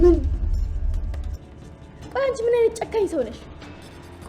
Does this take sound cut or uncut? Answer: cut